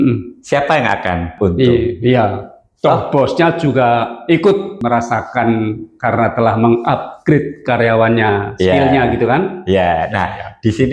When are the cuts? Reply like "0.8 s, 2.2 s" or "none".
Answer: 1.3 s, 4.7 s